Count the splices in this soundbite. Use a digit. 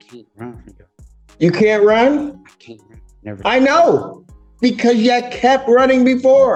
0